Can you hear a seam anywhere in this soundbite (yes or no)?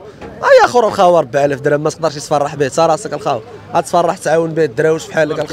no